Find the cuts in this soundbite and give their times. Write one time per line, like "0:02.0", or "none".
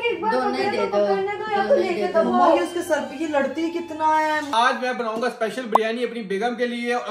0:04.5

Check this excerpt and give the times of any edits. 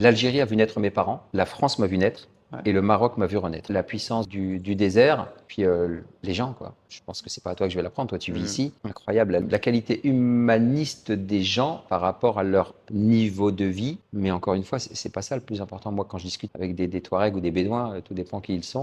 0:03.7

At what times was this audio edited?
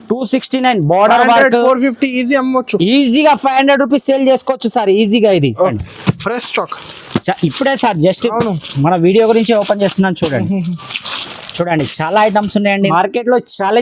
0:05.8
0:12.9

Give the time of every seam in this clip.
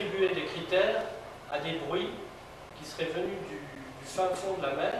0:01.9

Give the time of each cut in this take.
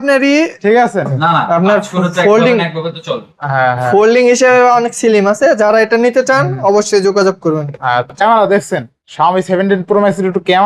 0:01.2
0:08.2

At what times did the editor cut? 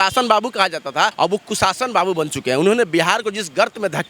0:01.1

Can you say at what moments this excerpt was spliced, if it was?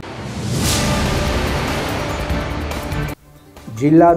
0:02.8

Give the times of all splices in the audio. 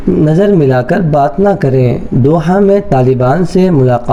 none

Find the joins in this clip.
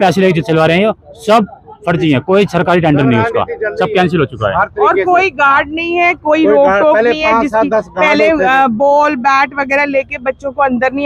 none

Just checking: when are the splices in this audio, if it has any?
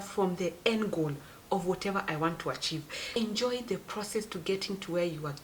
0:03.2

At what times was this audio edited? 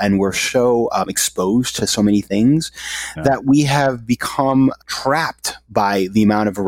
0:04.8

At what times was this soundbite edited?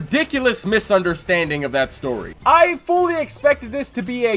0:02.3

